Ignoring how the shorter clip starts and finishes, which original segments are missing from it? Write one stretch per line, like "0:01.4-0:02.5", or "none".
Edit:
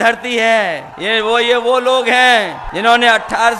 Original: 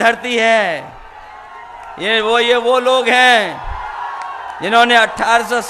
0:00.9-0:01.9
0:03.6-0:04.5